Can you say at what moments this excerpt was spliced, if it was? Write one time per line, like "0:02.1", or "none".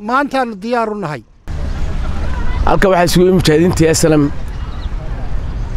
none